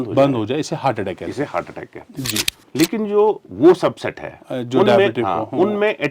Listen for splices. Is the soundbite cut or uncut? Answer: cut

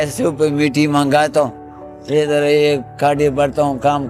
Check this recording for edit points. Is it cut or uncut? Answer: uncut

